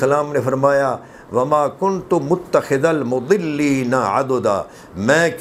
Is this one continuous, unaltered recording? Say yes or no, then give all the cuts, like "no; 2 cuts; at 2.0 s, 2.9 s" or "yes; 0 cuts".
yes; 0 cuts